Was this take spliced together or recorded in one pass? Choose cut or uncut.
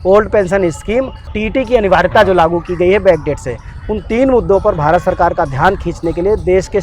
cut